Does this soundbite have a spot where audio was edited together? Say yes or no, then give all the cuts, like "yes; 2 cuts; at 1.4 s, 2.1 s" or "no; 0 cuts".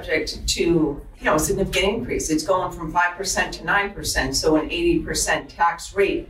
yes; 1 cut; at 1.1 s